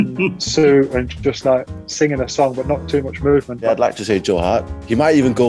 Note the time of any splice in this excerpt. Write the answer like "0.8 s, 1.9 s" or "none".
3.6 s